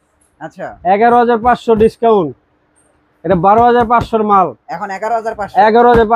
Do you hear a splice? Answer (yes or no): no